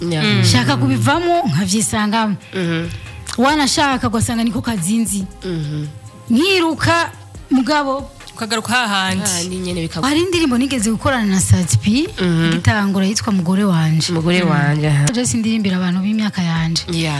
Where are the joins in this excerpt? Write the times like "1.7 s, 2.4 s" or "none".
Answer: 10.0 s, 15.1 s

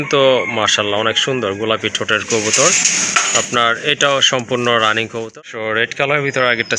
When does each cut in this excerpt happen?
5.4 s

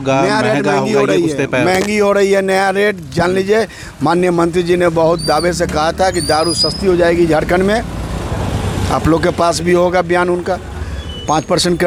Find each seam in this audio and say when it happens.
none

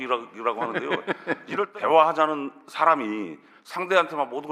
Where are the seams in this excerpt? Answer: 1.7 s

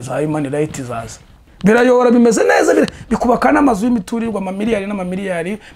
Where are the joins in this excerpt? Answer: 1.5 s

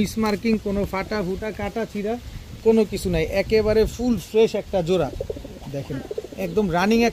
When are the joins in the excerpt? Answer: none

